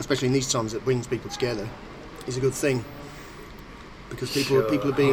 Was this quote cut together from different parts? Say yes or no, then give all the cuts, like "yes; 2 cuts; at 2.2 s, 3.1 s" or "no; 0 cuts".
no; 0 cuts